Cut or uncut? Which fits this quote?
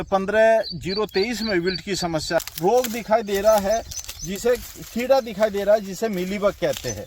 cut